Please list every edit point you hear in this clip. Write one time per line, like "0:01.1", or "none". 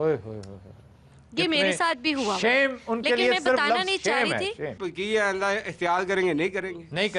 0:04.8